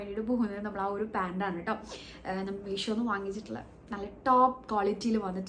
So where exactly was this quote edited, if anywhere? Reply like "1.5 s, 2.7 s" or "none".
none